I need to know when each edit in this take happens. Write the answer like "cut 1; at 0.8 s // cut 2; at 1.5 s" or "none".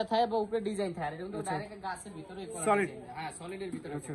none